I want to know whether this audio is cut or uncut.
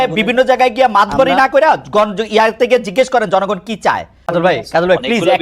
cut